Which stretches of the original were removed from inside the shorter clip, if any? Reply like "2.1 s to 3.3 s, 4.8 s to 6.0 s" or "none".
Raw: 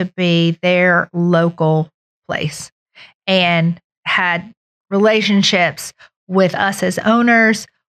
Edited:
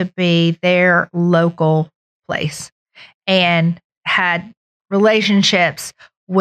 none